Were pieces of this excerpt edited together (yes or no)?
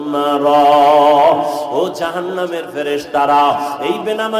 no